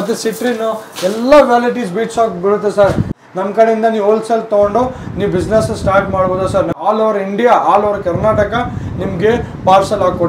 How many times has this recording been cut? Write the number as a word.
two